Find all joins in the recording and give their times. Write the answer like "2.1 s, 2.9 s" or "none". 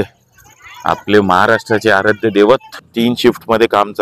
2.8 s

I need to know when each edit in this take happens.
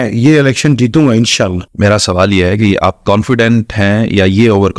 1.6 s

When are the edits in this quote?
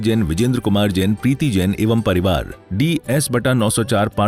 2.6 s

